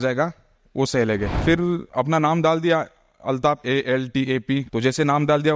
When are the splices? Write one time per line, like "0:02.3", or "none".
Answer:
0:01.8
0:04.7

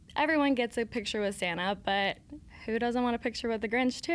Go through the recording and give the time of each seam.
none

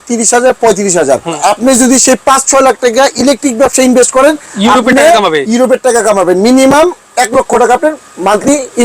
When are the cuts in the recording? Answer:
0:01.4

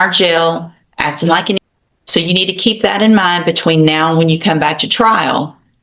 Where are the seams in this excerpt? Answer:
0:01.6

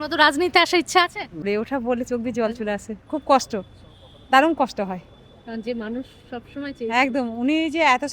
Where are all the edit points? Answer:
0:01.4

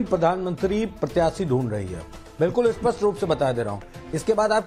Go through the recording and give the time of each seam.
none

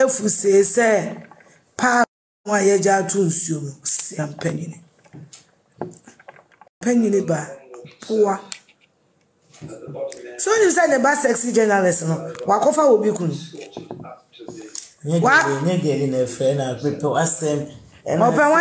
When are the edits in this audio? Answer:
0:06.8

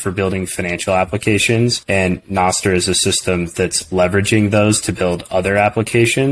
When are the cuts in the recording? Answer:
0:01.8

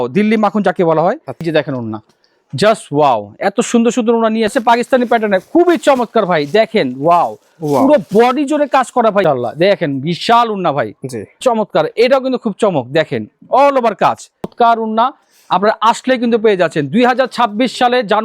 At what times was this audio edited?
0:01.5
0:04.5
0:09.2
0:11.4
0:14.5

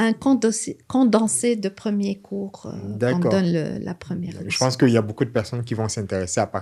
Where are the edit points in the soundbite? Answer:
none

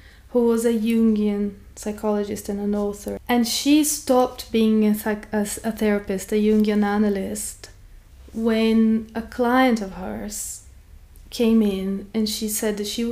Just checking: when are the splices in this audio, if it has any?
0:03.2

